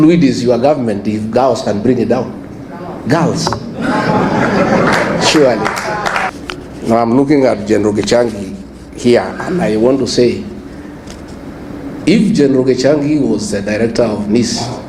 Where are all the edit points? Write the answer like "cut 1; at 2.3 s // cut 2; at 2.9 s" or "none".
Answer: cut 1; at 6.3 s